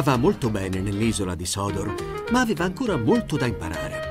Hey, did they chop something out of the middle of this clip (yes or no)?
no